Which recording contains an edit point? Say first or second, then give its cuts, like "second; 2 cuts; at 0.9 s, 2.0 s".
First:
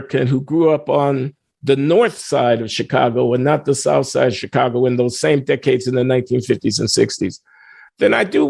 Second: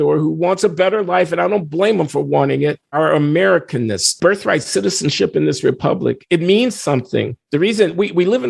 second; 2 cuts; at 2.9 s, 4.1 s